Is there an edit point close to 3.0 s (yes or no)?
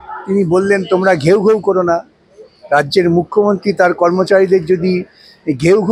no